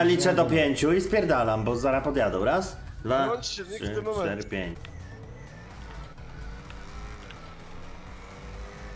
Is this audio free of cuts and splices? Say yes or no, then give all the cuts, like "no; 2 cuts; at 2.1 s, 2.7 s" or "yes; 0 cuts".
no; 1 cut; at 4.8 s